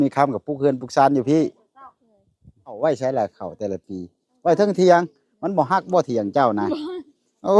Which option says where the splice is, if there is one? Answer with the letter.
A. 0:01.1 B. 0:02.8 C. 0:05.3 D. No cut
B